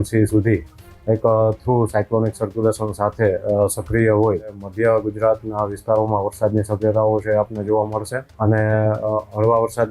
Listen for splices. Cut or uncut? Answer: cut